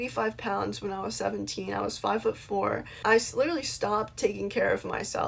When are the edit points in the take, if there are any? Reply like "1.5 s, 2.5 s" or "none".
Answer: 2.9 s